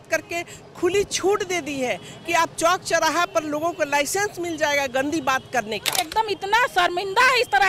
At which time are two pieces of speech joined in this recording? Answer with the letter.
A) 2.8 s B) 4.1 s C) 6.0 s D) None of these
C